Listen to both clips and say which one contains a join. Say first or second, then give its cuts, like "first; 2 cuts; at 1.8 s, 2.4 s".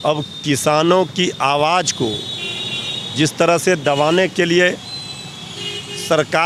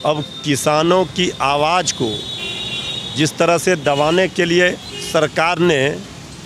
second; 1 cut; at 4.9 s